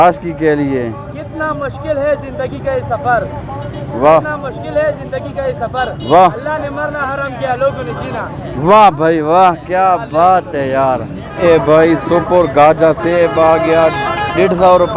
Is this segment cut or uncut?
cut